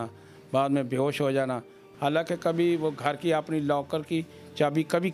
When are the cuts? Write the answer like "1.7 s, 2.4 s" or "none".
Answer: 1.8 s